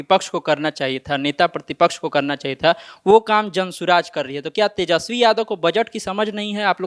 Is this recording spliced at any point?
no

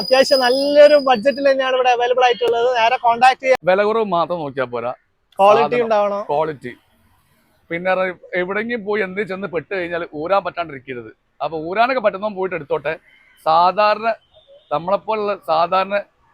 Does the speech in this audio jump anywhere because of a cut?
yes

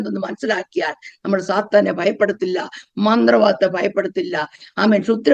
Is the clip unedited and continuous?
yes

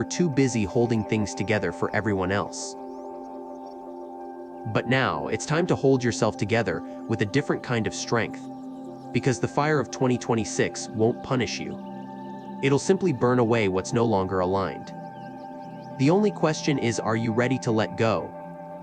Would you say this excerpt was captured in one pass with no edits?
no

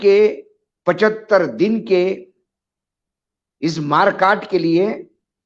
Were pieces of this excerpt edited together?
no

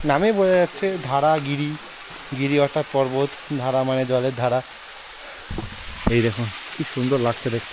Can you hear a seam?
no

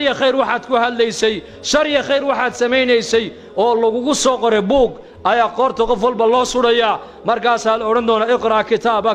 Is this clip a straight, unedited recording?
yes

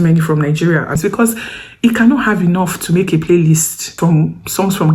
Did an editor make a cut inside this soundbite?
yes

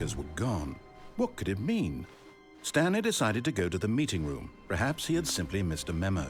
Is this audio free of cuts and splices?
yes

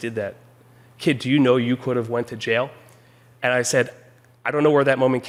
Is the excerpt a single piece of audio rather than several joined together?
yes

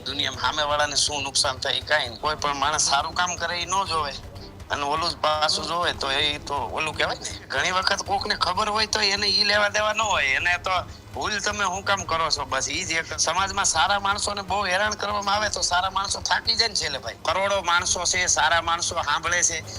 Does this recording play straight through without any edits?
no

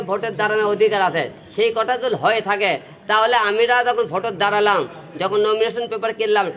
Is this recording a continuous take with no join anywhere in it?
yes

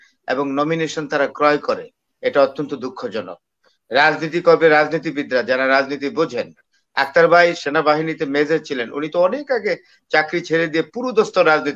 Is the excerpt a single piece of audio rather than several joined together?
yes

